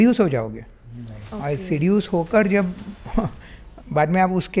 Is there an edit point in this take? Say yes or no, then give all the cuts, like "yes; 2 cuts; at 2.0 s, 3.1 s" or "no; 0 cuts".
no; 0 cuts